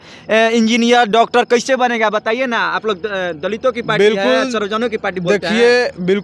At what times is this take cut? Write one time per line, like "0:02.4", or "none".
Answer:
none